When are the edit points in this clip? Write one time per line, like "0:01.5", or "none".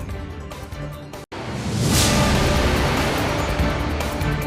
0:01.3